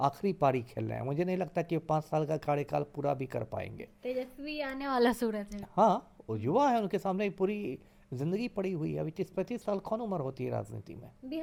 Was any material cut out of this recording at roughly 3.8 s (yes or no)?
no